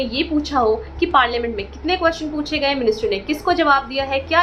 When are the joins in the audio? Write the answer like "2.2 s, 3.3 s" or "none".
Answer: none